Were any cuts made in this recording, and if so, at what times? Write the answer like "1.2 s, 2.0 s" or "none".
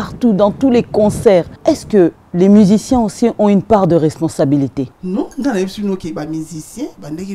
1.5 s, 5.0 s